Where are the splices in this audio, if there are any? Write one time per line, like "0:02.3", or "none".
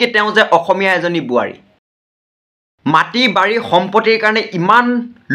0:02.4